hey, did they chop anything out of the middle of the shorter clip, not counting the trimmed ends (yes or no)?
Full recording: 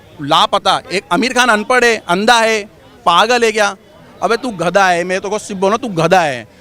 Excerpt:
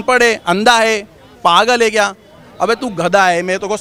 no